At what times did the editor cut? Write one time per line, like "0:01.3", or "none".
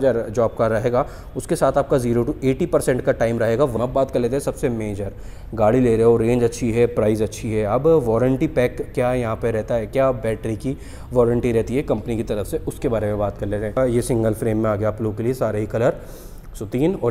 0:03.7
0:13.8